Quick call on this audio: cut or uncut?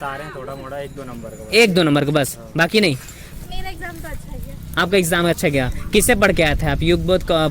cut